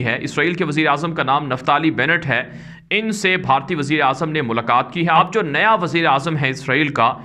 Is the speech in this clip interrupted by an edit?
yes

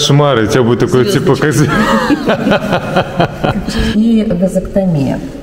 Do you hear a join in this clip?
yes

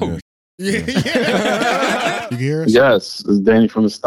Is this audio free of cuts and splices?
no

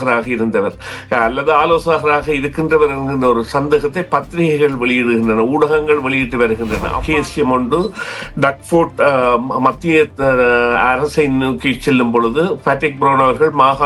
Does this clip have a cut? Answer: yes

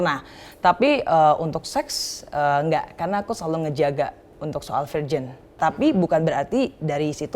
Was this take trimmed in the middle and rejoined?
yes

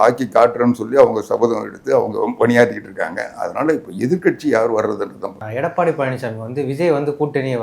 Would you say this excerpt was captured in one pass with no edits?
yes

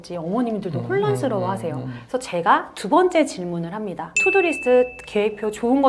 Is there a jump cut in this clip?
yes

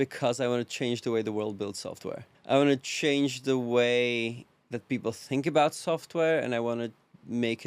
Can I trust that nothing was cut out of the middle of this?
no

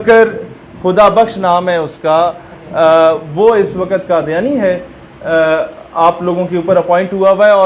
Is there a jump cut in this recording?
no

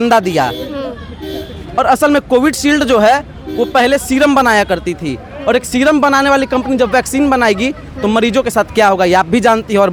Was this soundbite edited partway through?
no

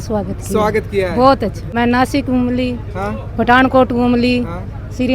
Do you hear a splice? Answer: yes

